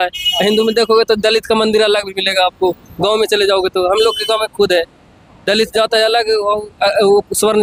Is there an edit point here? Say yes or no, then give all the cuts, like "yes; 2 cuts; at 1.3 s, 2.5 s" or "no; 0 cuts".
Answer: no; 0 cuts